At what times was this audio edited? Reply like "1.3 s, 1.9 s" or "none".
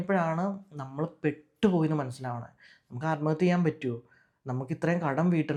none